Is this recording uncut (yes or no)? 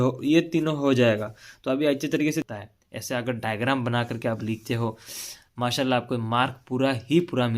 no